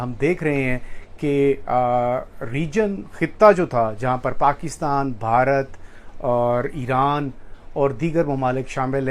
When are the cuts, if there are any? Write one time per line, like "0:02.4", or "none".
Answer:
none